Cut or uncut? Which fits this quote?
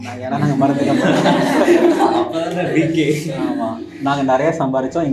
uncut